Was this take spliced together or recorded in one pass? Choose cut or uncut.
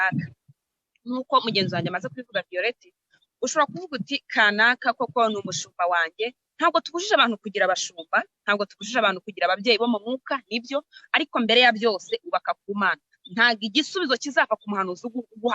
uncut